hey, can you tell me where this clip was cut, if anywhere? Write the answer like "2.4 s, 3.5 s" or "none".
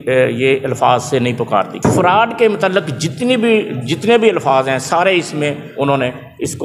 1.7 s